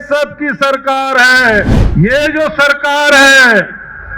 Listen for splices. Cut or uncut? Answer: cut